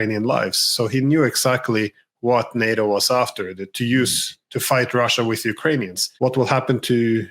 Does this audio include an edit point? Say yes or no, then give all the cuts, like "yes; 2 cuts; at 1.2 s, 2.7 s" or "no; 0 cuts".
yes; 1 cut; at 6.1 s